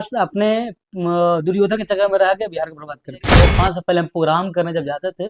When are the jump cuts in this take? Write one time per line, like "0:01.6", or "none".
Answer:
0:03.4